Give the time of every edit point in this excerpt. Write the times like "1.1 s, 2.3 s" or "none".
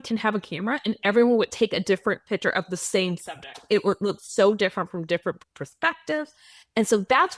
none

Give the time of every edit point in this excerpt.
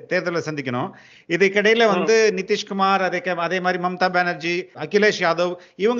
4.7 s

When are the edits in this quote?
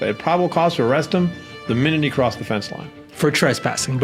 none

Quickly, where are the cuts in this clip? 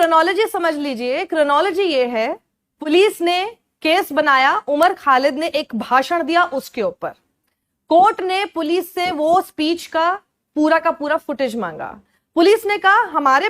2.9 s

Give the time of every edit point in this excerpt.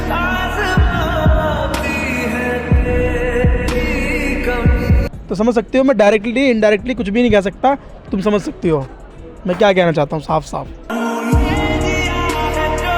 5.1 s

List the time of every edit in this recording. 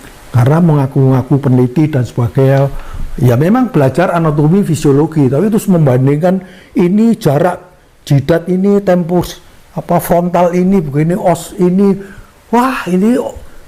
none

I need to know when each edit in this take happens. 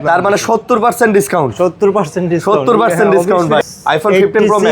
3.7 s

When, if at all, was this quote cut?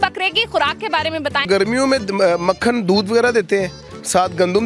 1.5 s

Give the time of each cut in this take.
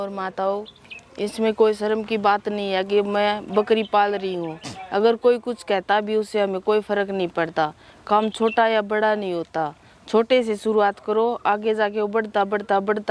none

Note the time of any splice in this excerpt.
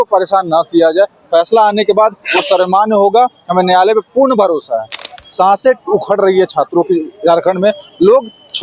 4.9 s

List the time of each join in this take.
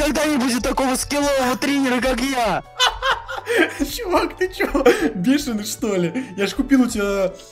none

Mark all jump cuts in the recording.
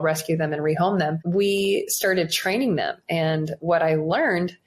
1.2 s

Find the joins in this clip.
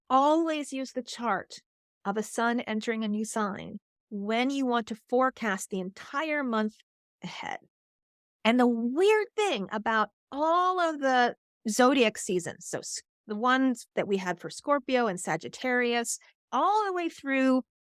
none

